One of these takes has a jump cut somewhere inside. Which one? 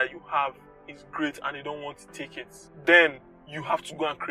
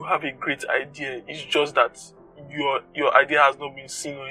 first; 1 cut; at 2.6 s

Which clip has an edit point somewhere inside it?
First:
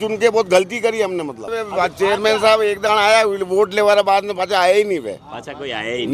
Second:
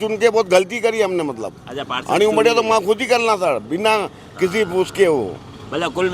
first; 1 cut; at 1.6 s

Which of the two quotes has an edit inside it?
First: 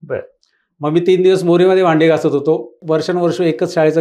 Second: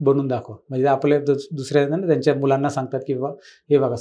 first; 1 cut; at 2.8 s

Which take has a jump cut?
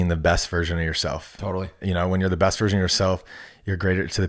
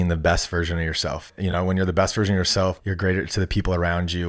second; 2 cuts; at 1.3 s, 2.9 s

